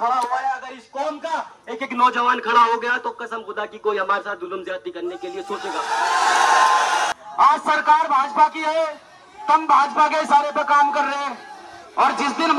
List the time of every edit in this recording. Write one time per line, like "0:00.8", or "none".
0:07.1